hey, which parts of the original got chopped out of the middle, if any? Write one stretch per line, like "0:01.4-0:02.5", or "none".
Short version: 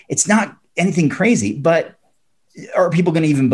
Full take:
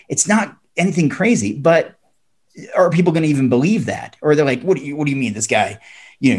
none